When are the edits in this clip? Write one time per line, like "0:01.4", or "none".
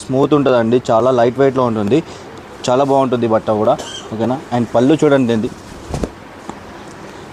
none